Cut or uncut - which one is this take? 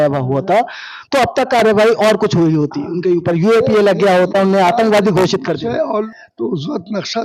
cut